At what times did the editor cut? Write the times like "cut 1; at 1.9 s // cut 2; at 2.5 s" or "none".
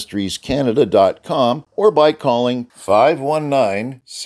cut 1; at 1.7 s

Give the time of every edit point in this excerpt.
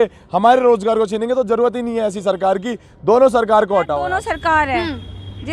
cut 1; at 4.1 s

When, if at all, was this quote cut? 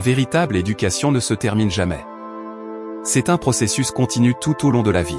none

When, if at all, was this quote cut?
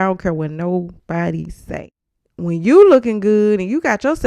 cut 1; at 1.6 s

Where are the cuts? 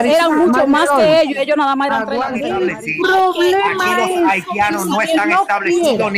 cut 1; at 2.4 s

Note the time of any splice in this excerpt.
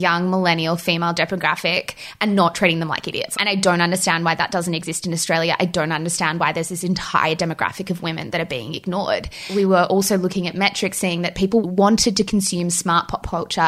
cut 1; at 3.2 s // cut 2; at 9.5 s // cut 3; at 11.6 s

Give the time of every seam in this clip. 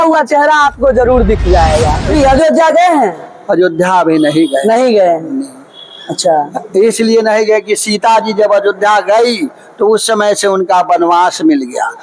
cut 1; at 2.1 s

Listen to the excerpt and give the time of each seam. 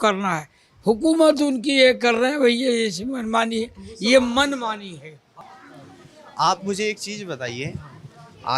cut 1; at 5.3 s

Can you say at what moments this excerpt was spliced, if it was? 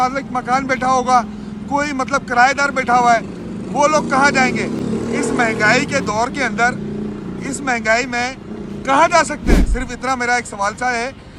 none

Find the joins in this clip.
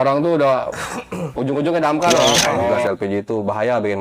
cut 1; at 2.8 s

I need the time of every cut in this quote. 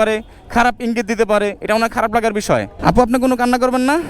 cut 1; at 2.7 s

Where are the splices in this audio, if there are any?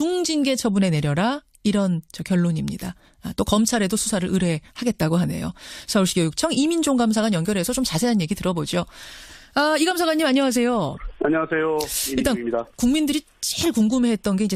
cut 1; at 6.7 s

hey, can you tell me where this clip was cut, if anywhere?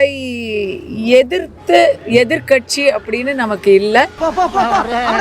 cut 1; at 4.1 s

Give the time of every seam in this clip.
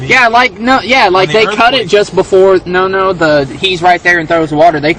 cut 1; at 0.9 s

